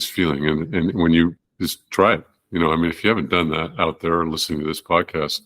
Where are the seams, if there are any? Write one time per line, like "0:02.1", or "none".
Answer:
0:01.4